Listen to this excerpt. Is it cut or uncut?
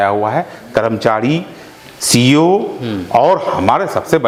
uncut